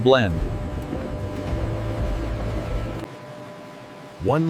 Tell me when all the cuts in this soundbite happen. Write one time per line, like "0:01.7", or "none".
none